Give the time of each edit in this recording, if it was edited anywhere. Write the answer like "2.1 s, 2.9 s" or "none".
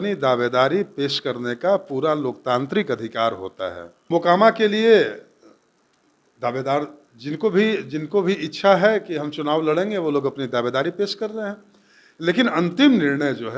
4.0 s

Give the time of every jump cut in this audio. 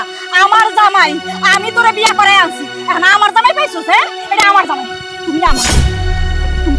none

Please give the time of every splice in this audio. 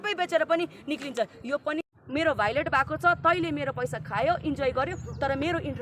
1.8 s

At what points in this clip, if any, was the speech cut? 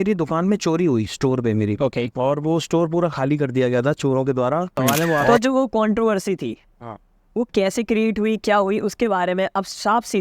4.8 s

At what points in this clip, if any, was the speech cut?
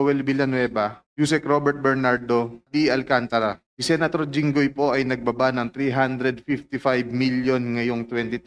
1.0 s, 2.6 s, 3.7 s

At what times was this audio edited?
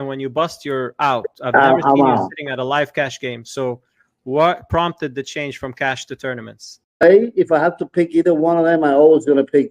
7.0 s

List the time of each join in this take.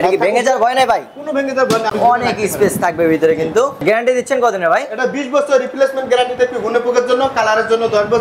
1.9 s, 3.8 s

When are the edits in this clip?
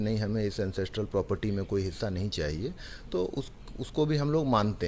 none

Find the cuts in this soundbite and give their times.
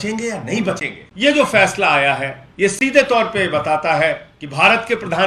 1.0 s, 2.4 s, 4.4 s

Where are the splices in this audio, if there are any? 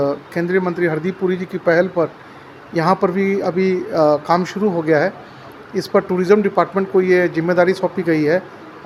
none

